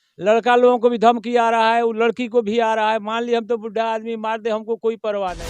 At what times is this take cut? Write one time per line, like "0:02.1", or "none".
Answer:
none

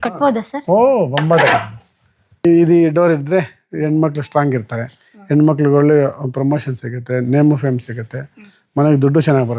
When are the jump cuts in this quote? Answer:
0:02.4

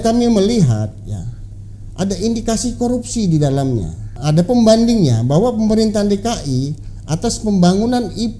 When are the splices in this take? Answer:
0:04.1

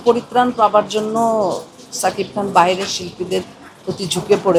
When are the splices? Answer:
none

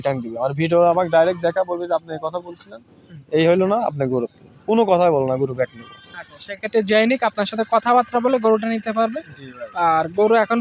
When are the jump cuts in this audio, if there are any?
none

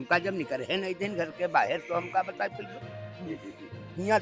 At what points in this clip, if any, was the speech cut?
none

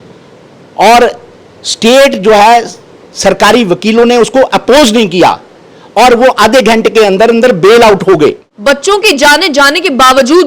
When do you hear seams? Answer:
0:08.5

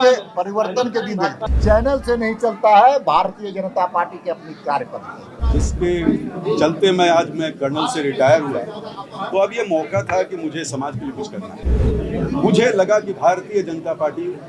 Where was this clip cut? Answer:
0:01.5
0:05.4
0:11.6

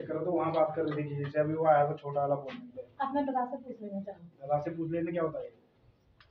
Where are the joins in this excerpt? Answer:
none

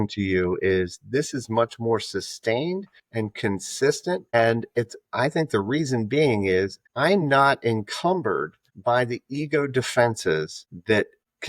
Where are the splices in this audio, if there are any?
none

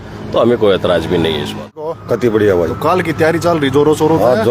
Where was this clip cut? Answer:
0:01.7

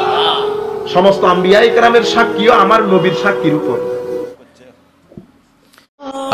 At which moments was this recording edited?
0:04.4

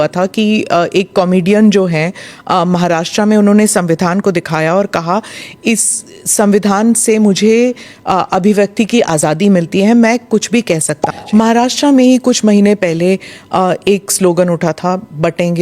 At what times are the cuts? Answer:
0:11.1

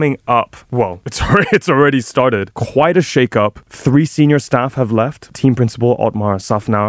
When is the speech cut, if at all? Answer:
0:02.6
0:03.6
0:05.3

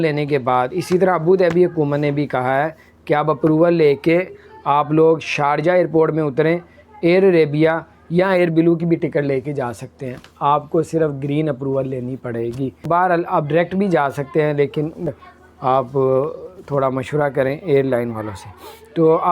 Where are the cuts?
0:12.9
0:15.1

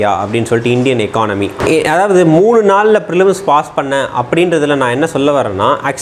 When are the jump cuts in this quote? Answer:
0:01.5

